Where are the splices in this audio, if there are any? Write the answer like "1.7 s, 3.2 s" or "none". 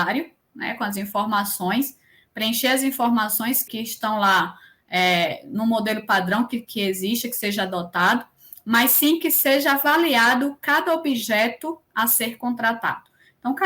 3.7 s